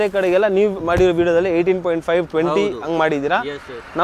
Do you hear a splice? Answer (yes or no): no